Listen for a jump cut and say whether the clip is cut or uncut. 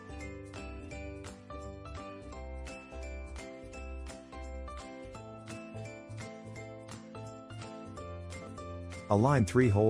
cut